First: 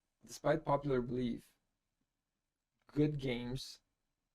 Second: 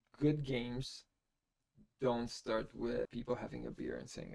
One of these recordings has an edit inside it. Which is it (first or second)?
second